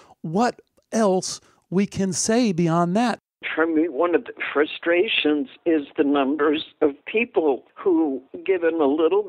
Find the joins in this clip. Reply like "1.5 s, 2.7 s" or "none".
3.5 s, 7.7 s